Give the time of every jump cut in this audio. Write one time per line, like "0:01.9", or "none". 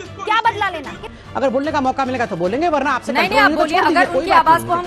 0:01.0